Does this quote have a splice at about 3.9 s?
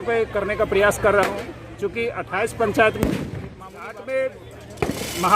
yes; 1 cut; at 3.9 s

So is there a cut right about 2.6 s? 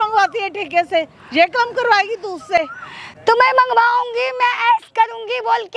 no; 0 cuts

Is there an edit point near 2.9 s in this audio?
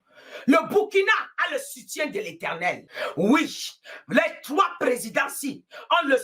yes; 1 cut; at 2.9 s

